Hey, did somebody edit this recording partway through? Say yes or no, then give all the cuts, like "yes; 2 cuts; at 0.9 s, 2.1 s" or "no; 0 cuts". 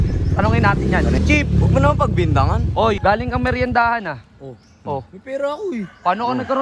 yes; 2 cuts; at 1.2 s, 3.0 s